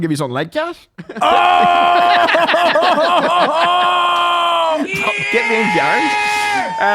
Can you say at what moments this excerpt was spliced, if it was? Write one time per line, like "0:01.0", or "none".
none

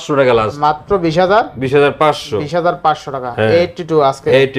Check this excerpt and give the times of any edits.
none

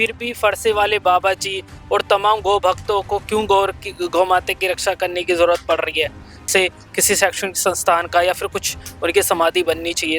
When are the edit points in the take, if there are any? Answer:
0:06.4

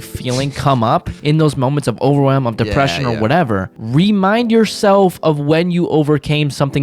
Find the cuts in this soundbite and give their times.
0:01.1
0:03.8

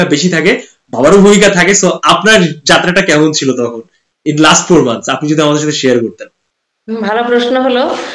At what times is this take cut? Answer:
none

